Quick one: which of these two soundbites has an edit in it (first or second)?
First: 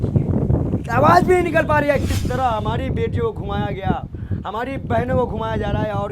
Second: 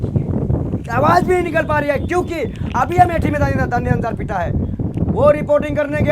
first